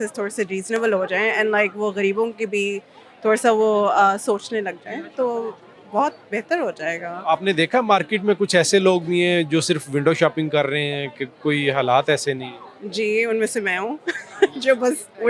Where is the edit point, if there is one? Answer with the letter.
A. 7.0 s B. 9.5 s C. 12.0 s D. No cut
D